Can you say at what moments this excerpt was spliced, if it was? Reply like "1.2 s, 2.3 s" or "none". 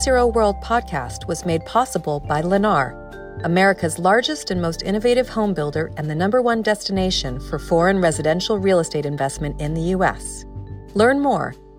none

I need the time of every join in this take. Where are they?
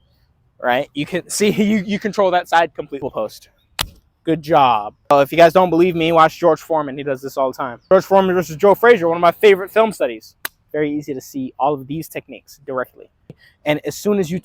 3.0 s, 5.1 s, 7.9 s, 13.5 s

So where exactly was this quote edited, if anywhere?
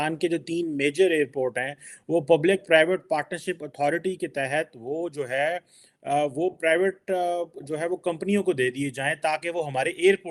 none

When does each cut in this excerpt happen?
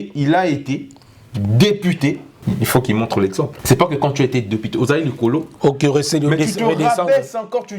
2.3 s, 3.6 s

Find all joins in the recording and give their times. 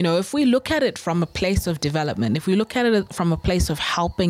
none

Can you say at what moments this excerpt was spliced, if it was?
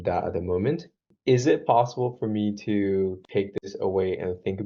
1.1 s

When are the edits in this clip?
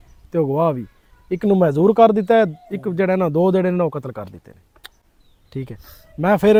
none

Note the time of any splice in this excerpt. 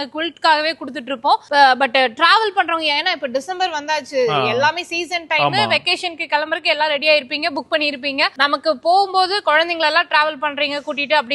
none

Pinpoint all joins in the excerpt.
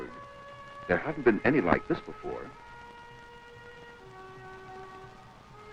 3.6 s

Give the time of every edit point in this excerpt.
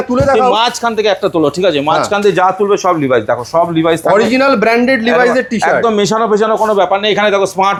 none

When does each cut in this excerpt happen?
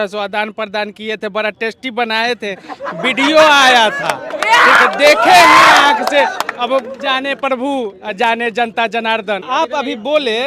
9.5 s

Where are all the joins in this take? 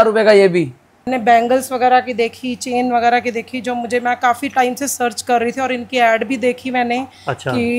1.1 s

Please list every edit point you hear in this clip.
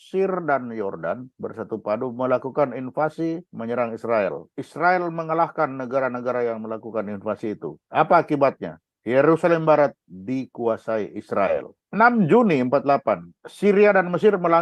4.6 s, 7.8 s, 11.8 s

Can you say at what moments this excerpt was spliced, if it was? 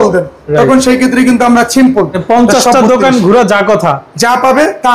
2.2 s

